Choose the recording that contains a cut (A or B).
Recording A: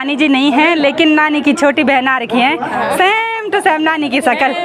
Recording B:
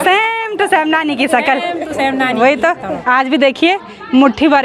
B